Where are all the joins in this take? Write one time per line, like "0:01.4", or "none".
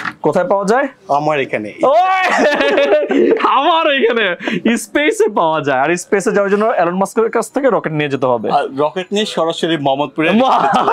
none